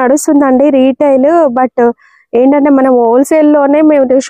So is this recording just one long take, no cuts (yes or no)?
yes